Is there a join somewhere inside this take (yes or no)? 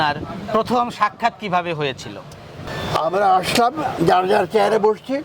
yes